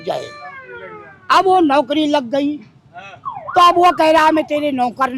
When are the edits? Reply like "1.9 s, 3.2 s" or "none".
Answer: none